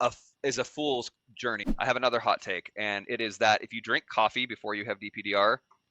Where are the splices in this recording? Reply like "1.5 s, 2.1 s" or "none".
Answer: 1.6 s

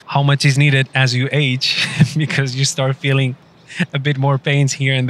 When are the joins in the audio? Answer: none

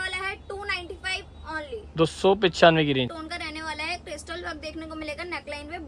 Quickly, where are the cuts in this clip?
3.1 s

